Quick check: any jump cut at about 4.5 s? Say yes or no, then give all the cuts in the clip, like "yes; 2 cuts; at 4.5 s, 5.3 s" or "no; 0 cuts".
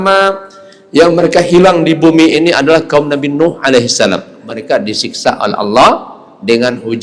yes; 1 cut; at 4.5 s